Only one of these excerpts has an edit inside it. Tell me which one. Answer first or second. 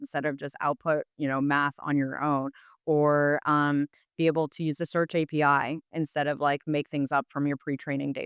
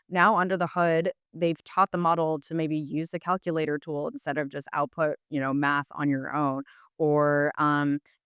second